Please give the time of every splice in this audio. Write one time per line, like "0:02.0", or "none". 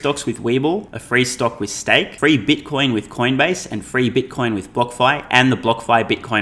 0:01.0
0:02.1